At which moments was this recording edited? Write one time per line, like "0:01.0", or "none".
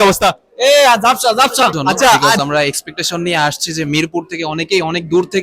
0:02.4